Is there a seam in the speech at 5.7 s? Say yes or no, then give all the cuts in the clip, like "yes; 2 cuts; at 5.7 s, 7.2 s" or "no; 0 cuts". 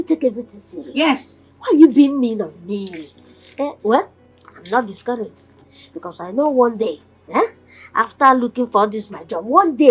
no; 0 cuts